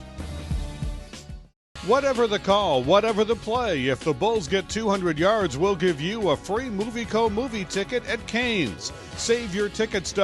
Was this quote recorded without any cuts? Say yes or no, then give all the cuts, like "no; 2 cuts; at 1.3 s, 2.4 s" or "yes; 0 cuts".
no; 1 cut; at 1.1 s